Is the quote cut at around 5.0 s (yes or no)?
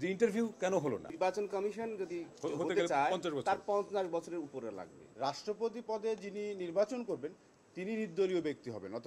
yes